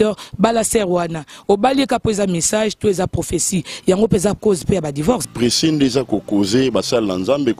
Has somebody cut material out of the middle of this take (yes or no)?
yes